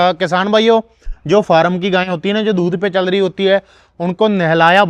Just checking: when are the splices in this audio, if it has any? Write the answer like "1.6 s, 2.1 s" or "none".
none